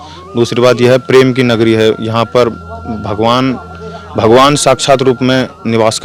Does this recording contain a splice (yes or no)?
no